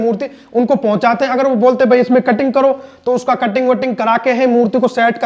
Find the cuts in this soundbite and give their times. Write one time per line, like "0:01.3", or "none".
none